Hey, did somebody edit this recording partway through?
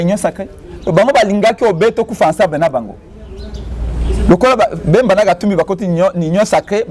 no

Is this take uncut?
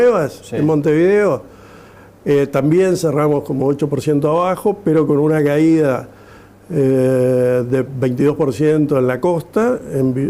yes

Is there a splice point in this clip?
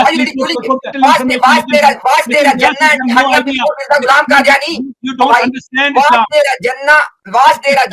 yes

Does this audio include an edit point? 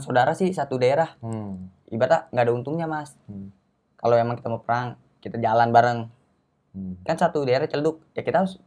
no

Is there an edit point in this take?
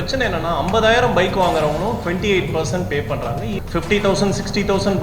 yes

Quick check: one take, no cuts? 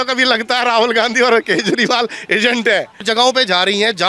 no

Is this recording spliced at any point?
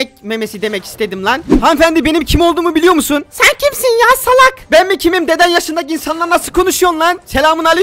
yes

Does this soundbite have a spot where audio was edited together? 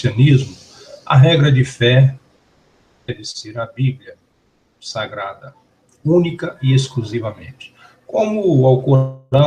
yes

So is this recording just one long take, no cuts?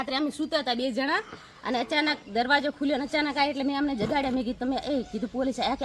yes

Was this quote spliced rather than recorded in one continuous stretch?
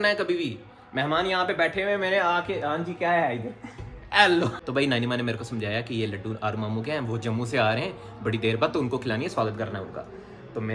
yes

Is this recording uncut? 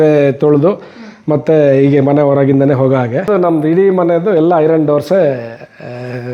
no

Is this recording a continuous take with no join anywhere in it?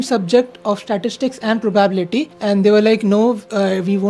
yes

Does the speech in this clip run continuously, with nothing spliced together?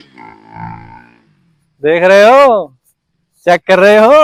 yes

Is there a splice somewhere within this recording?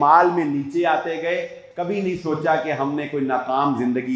no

